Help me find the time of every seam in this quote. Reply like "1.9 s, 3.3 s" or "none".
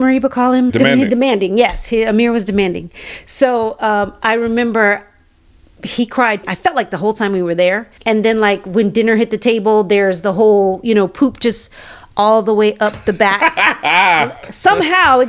none